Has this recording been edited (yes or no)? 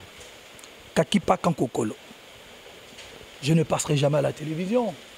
no